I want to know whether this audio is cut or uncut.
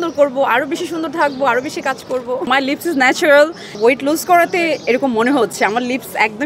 cut